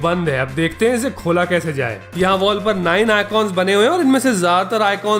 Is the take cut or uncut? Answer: cut